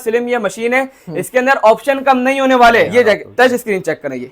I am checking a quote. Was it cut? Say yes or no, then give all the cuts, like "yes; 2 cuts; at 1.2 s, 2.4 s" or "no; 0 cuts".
yes; 1 cut; at 2.9 s